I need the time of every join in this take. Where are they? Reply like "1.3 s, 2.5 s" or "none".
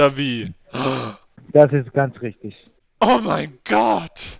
none